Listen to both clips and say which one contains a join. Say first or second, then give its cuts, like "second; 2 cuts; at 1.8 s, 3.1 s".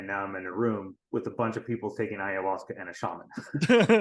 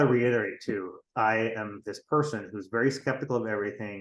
first; 1 cut; at 1.0 s